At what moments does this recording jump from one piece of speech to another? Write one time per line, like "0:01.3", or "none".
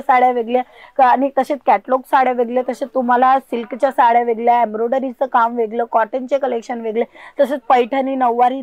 none